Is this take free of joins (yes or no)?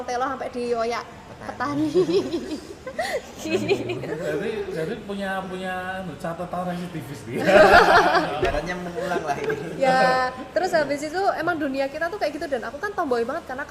yes